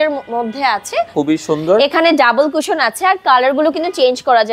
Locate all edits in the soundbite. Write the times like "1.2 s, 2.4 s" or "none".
1.1 s